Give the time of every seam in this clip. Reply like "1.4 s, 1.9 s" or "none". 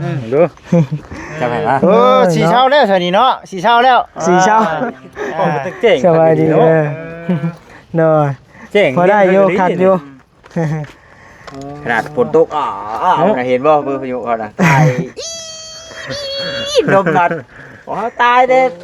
none